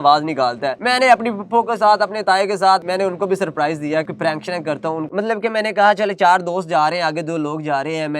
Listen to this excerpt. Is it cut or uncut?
cut